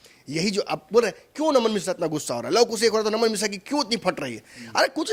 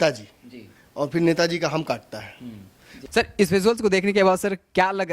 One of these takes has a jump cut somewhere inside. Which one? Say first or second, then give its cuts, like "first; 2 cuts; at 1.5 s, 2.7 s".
second; 1 cut; at 3.1 s